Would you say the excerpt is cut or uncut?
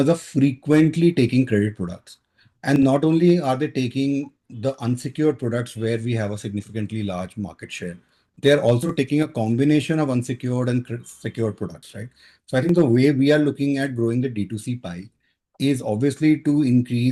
uncut